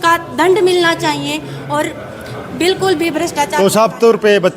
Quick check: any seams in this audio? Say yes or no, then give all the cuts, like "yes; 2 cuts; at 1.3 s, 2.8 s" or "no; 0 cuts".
no; 0 cuts